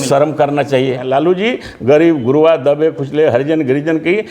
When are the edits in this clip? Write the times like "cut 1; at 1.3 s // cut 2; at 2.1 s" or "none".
cut 1; at 1.0 s